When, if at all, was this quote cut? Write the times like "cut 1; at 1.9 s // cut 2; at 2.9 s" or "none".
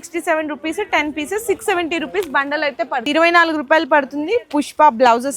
cut 1; at 3.0 s

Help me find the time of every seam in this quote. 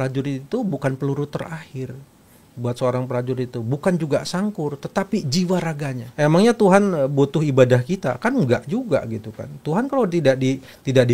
cut 1; at 6.0 s

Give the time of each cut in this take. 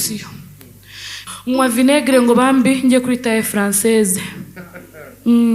cut 1; at 1.2 s

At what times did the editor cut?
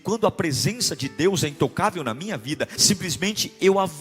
cut 1; at 2.8 s

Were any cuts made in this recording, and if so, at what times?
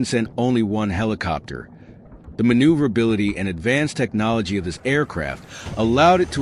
none

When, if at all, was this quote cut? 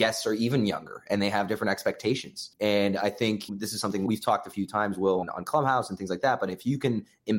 cut 1; at 2.4 s // cut 2; at 4.0 s // cut 3; at 5.2 s

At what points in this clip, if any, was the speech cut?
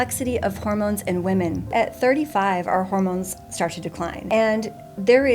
cut 1; at 1.7 s // cut 2; at 4.2 s

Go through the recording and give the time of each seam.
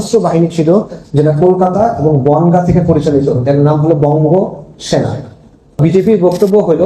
cut 1; at 5.8 s

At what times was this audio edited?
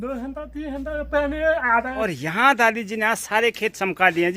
cut 1; at 2.0 s

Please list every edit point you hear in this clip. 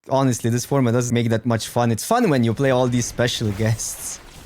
cut 1; at 1.1 s

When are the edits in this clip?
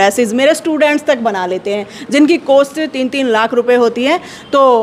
none

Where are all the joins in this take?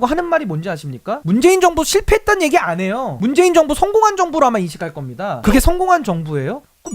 cut 1; at 5.4 s

